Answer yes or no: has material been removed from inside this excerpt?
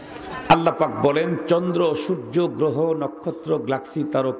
no